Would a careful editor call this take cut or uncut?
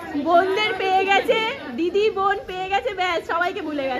uncut